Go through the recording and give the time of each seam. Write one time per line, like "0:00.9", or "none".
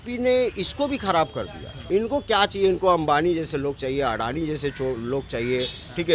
0:01.7